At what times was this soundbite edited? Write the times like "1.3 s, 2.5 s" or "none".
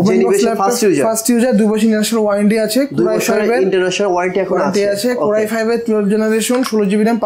none